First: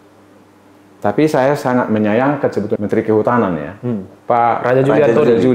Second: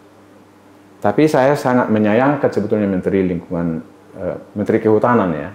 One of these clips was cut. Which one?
first; 1 cut; at 2.8 s

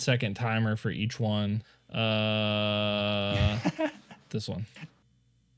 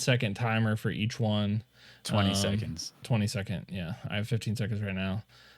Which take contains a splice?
first; 1 cut; at 1.8 s

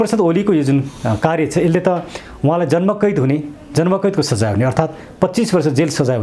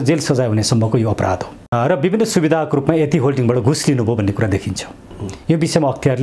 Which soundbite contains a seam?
second; 1 cut; at 1.6 s

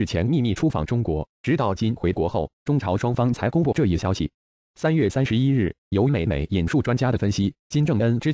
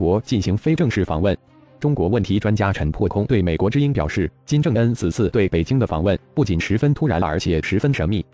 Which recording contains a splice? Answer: second; 1 cut; at 1.5 s

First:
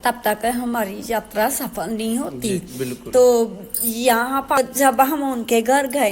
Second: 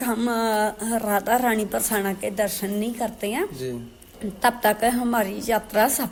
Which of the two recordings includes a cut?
first; 1 cut; at 4.6 s

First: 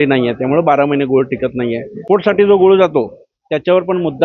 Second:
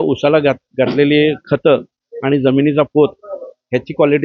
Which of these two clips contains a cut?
first; 1 cut; at 1.9 s

